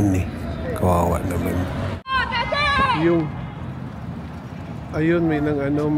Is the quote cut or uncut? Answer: cut